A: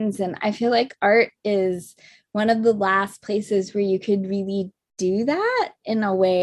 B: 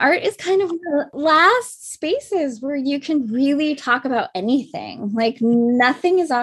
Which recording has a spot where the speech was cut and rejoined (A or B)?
B